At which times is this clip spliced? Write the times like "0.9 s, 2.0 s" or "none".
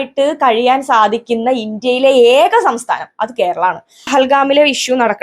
4.1 s